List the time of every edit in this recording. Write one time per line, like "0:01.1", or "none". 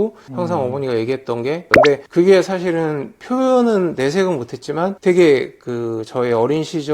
0:01.7